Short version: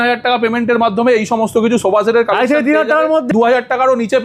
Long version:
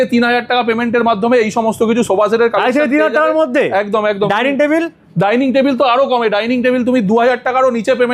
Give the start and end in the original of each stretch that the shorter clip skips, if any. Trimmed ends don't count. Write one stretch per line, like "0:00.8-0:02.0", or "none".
0:03.5-0:07.0